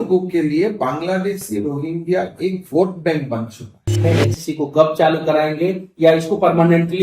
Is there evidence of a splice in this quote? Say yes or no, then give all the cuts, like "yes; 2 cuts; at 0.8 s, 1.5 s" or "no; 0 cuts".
yes; 1 cut; at 4.0 s